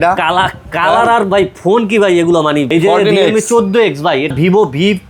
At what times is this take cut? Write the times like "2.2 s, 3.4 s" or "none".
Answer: 2.7 s, 4.3 s